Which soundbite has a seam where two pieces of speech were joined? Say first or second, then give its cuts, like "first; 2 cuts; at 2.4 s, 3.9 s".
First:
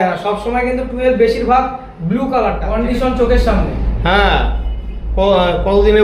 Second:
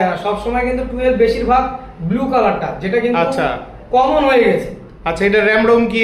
first; 1 cut; at 2.6 s